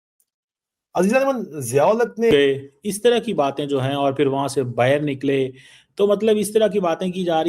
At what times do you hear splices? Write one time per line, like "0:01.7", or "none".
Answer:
0:02.3